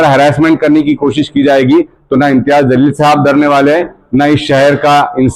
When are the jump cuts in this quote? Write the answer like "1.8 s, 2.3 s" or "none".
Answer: none